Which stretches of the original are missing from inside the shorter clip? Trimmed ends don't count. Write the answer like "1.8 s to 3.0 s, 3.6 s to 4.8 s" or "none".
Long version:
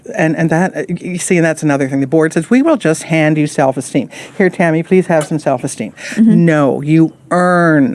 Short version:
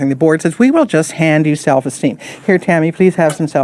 none